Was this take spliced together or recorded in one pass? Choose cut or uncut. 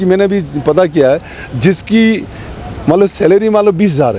uncut